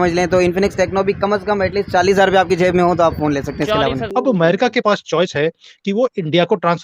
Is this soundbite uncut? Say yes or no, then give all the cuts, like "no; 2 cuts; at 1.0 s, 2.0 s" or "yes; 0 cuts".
no; 1 cut; at 4.0 s